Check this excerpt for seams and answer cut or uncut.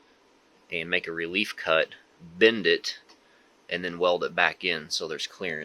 uncut